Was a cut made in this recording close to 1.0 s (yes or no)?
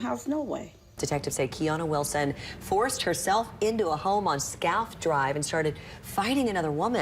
yes